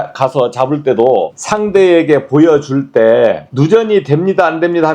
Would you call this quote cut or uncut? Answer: cut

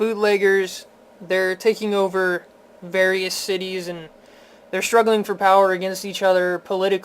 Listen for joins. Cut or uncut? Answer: cut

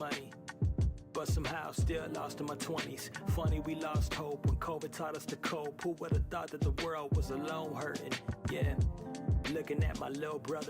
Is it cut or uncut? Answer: cut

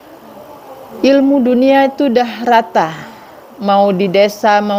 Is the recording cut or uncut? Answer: uncut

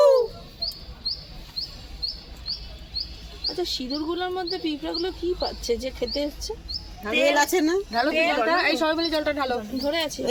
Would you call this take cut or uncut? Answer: uncut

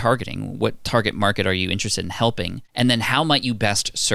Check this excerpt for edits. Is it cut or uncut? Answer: cut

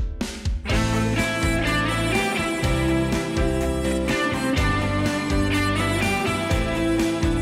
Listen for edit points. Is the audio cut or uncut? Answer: uncut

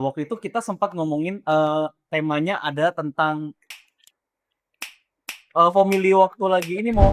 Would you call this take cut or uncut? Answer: cut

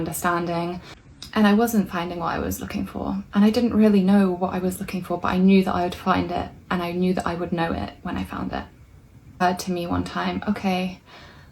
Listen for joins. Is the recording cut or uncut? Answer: cut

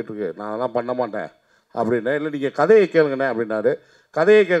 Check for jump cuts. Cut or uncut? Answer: uncut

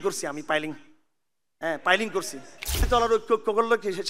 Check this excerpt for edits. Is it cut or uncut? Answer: cut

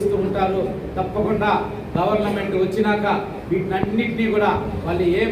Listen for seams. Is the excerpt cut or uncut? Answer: uncut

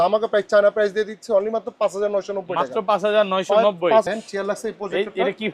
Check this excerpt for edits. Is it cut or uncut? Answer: cut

